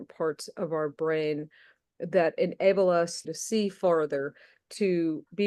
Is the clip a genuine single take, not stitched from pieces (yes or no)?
no